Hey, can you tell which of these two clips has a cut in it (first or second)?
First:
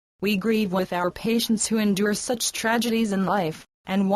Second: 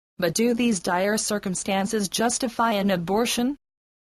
first